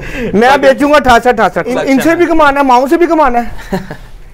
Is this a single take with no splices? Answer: no; 1 cut; at 1.7 s

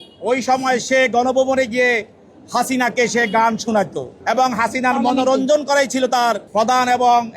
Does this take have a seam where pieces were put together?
yes; 2 cuts; at 4.1 s, 6.4 s

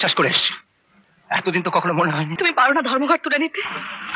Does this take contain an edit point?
yes; 1 cut; at 2.3 s

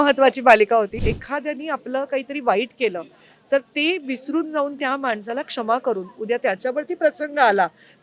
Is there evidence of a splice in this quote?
yes; 1 cut; at 1.0 s

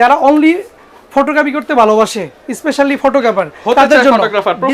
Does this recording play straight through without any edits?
yes; 0 cuts

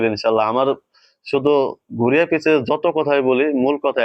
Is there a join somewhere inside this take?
no; 0 cuts

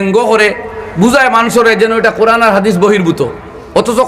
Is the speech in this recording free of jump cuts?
yes; 0 cuts

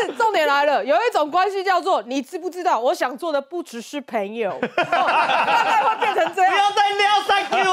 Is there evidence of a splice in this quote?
no; 0 cuts

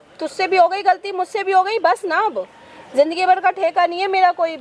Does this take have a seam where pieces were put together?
no; 0 cuts

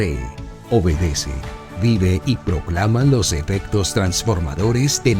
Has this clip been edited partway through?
no; 0 cuts

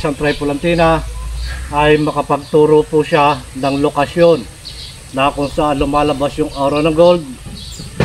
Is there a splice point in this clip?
no; 0 cuts

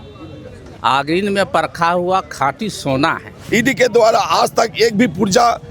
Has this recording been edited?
yes; 1 cut; at 3.3 s

